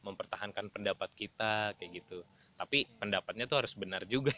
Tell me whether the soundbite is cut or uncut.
uncut